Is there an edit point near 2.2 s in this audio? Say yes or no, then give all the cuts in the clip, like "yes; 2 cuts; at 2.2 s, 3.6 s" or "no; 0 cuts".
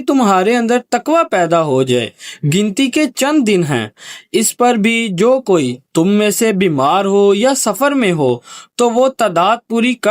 yes; 1 cut; at 2.2 s